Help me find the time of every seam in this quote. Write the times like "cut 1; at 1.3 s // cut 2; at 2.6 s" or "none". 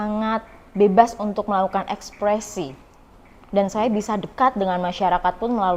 none